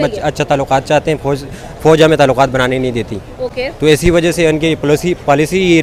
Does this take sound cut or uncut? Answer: uncut